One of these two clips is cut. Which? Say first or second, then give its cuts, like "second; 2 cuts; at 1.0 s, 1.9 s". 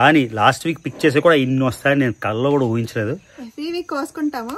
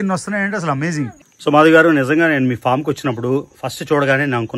second; 1 cut; at 1.2 s